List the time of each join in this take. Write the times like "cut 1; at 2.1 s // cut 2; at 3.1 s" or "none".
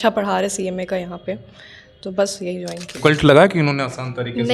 cut 1; at 2.9 s